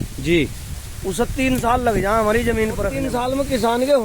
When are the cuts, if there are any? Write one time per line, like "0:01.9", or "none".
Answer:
0:03.0